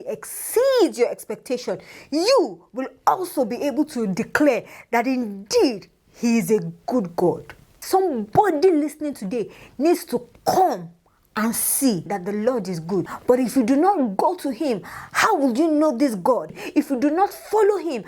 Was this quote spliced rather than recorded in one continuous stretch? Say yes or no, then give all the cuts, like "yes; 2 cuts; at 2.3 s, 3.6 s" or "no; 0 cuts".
yes; 2 cuts; at 7.8 s, 12.1 s